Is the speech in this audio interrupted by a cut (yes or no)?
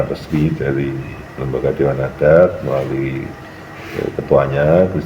no